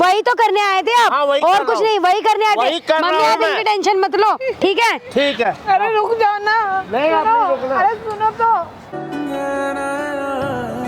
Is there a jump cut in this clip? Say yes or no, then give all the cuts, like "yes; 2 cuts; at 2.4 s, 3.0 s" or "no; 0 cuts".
no; 0 cuts